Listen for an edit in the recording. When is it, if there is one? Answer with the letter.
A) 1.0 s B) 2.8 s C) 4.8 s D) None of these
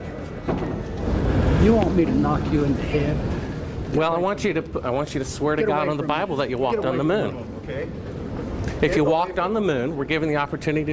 A